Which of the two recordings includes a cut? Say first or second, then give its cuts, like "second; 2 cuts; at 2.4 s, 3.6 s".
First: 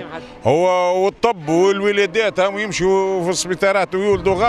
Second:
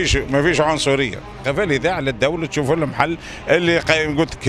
second; 1 cut; at 1.4 s